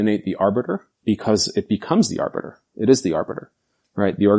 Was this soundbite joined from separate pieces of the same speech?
no; 0 cuts

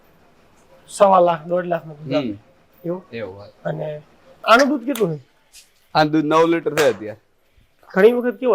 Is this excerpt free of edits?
no; 1 cut; at 4.4 s

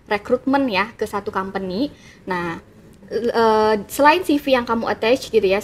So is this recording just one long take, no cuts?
yes; 0 cuts

